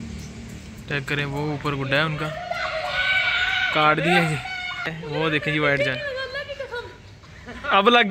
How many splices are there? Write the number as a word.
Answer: one